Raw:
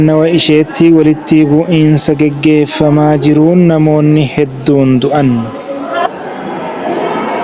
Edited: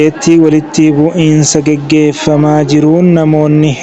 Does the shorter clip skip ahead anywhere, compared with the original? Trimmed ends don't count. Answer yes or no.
no